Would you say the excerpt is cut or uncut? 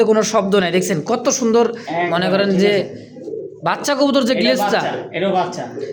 uncut